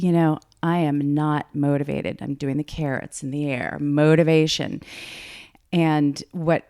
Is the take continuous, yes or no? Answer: no